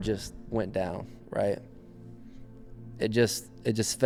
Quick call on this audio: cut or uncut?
uncut